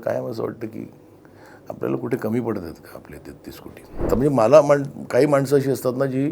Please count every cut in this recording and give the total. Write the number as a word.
one